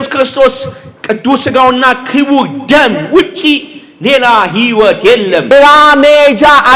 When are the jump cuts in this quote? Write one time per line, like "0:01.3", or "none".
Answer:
0:05.5